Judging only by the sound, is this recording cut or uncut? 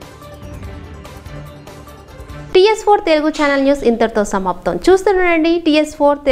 uncut